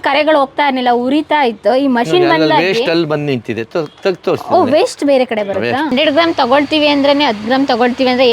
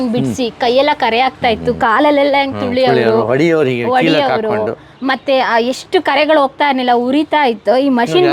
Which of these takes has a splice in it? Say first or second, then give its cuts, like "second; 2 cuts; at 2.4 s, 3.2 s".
first; 1 cut; at 5.9 s